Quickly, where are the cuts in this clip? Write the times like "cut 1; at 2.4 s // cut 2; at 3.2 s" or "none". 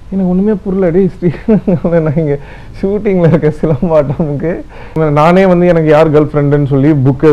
cut 1; at 5.0 s